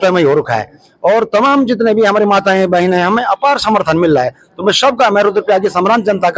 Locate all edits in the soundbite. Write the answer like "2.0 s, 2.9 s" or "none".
none